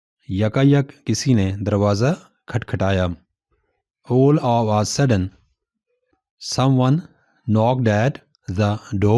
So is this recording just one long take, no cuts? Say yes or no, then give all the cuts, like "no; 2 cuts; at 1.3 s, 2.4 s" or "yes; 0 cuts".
yes; 0 cuts